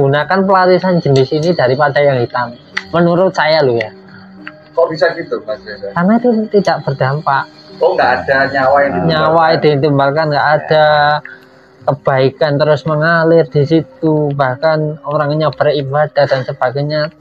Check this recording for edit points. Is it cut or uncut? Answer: uncut